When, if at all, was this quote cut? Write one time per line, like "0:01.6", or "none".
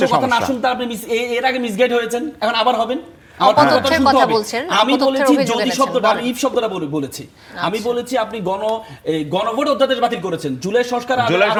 none